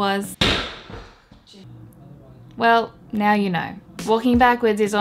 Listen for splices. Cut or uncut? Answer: uncut